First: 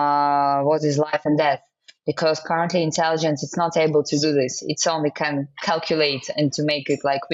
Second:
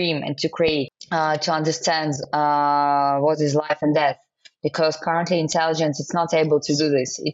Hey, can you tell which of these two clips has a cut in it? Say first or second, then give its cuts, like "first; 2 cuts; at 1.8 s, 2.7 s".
second; 1 cut; at 0.9 s